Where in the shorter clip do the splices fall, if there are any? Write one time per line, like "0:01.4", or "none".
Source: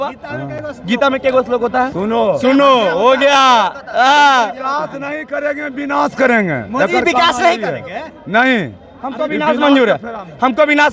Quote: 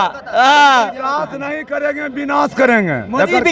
none